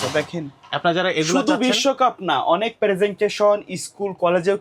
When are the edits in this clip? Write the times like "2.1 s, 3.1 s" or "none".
none